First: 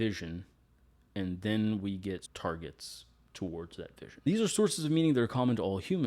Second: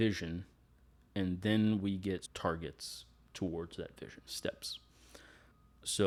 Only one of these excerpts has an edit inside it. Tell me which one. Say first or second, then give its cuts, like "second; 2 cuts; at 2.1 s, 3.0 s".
first; 1 cut; at 4.3 s